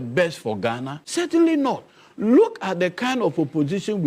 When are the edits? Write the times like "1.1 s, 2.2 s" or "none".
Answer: 1.0 s